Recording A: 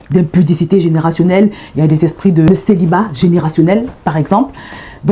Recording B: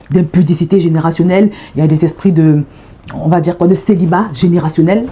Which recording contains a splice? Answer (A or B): A